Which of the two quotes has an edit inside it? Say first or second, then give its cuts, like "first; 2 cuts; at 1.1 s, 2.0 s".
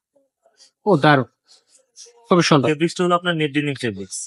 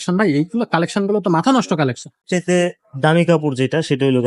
second; 1 cut; at 2.2 s